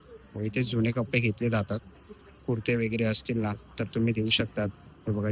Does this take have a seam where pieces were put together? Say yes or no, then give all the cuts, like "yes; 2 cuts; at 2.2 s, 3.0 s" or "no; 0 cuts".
no; 0 cuts